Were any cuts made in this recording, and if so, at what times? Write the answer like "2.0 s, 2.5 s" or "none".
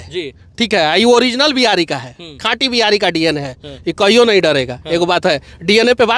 none